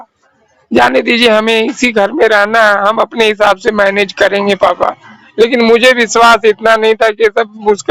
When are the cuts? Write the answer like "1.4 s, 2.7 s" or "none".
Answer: none